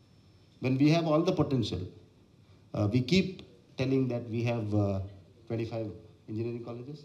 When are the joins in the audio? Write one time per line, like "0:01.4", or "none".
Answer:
none

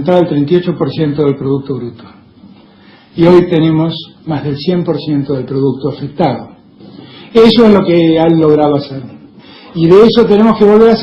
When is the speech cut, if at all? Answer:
0:08.7

